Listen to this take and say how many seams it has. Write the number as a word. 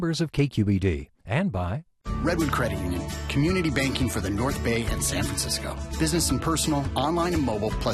one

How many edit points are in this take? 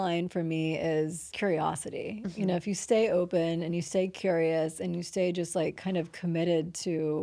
one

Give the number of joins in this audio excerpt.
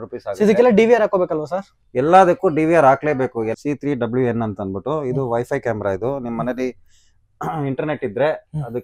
one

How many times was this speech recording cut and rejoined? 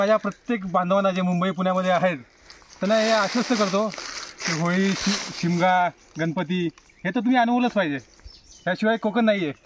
zero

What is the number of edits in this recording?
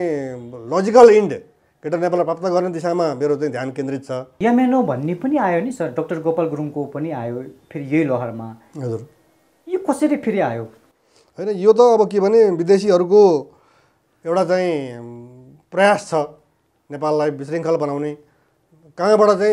one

